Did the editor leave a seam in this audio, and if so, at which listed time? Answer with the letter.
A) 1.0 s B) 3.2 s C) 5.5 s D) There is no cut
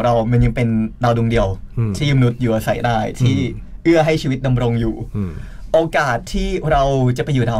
D